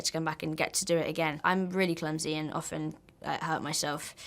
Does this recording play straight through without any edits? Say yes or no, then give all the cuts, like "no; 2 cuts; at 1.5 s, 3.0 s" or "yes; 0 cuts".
no; 1 cut; at 1.4 s